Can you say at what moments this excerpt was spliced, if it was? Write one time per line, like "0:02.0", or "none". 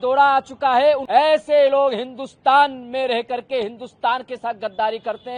0:01.0